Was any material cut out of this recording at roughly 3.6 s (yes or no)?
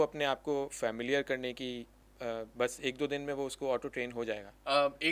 no